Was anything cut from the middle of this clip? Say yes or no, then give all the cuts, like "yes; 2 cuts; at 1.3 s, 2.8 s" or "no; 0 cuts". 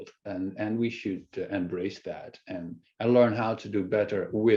no; 0 cuts